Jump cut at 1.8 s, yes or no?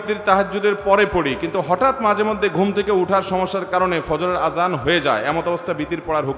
no